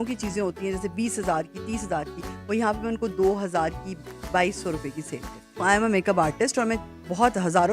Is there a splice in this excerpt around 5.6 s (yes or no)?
yes